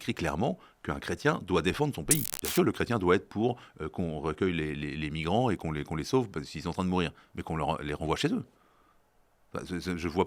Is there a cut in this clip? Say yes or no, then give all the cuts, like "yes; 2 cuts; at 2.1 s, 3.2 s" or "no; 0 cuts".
yes; 1 cut; at 2.4 s